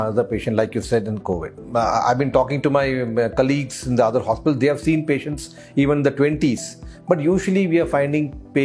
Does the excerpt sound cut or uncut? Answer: uncut